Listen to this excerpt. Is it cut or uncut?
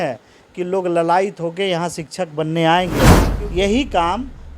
cut